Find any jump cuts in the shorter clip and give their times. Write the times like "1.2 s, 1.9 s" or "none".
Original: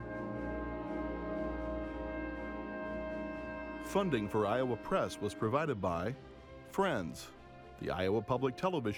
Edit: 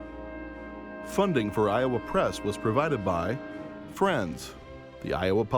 1.1 s